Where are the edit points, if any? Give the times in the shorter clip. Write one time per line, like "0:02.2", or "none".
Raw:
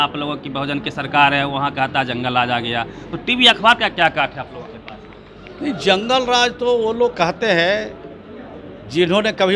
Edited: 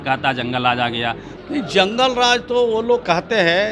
0:01.3